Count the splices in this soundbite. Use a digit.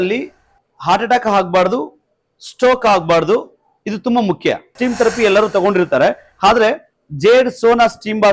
1